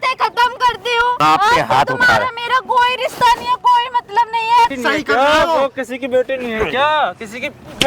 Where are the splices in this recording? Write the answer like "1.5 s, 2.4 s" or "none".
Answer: 1.2 s, 4.7 s